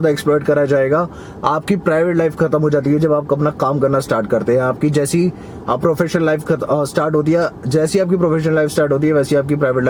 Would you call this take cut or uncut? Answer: uncut